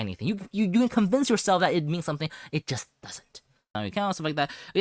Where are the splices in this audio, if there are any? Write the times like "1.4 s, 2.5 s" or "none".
3.7 s